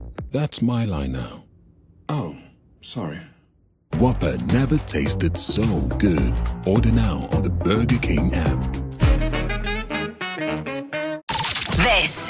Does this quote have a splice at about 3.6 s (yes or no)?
no